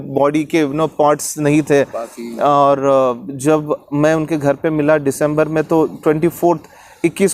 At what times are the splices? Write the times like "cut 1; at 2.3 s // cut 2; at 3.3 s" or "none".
none